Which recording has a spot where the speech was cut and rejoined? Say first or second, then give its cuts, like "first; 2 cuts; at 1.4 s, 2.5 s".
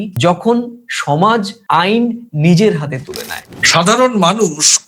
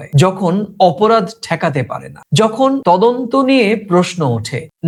first; 1 cut; at 3.5 s